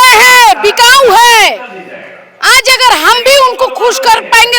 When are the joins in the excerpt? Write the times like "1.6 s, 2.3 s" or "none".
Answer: none